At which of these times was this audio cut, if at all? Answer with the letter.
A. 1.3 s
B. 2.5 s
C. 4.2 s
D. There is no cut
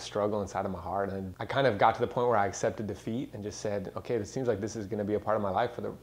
A